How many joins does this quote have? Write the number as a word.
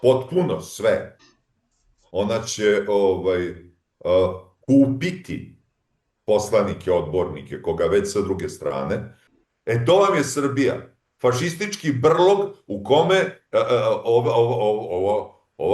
one